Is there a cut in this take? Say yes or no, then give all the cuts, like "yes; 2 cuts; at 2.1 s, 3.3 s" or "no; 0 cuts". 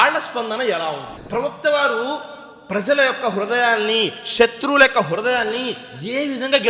yes; 1 cut; at 1.1 s